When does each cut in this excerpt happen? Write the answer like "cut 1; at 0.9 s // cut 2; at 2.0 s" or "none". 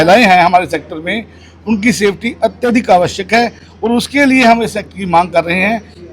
none